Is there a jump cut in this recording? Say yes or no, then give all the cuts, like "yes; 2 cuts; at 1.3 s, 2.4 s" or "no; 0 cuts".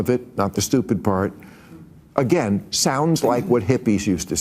no; 0 cuts